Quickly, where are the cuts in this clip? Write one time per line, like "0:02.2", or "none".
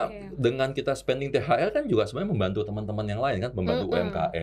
none